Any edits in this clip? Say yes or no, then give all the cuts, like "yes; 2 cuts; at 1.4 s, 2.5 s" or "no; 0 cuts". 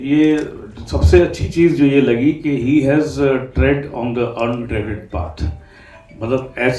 no; 0 cuts